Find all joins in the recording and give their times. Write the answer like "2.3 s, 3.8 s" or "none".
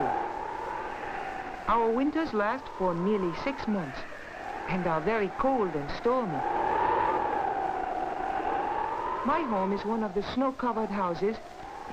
5.6 s